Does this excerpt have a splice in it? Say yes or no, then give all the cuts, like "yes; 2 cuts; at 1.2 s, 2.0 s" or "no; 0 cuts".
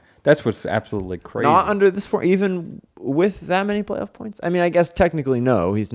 no; 0 cuts